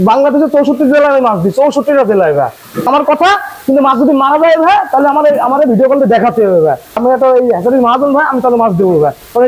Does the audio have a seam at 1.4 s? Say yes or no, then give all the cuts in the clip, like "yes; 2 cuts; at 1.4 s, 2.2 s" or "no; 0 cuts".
no; 2 cuts; at 2.9 s, 7.0 s